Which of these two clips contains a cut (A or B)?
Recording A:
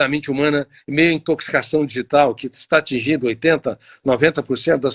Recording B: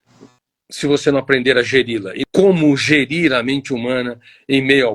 B